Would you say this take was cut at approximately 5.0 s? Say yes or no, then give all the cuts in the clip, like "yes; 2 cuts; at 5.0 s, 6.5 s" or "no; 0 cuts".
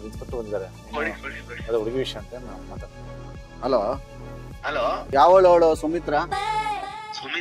yes; 1 cut; at 5.0 s